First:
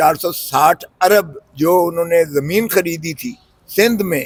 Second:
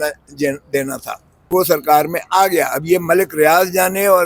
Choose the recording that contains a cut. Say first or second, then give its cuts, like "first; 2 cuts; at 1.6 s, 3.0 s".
second; 1 cut; at 1.5 s